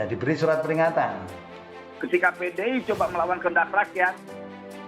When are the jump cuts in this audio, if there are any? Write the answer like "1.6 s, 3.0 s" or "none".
1.8 s